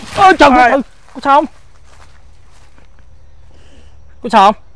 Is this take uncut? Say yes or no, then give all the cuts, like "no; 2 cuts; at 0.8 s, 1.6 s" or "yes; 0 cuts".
yes; 0 cuts